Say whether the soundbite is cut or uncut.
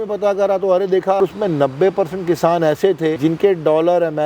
cut